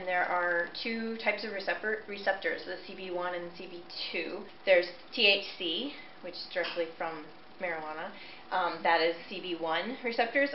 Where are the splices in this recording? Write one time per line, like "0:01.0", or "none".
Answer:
0:04.5